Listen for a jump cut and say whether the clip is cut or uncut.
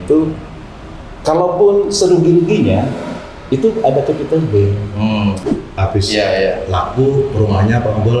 cut